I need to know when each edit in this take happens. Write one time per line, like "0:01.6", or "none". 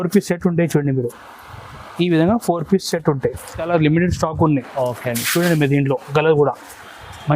0:03.7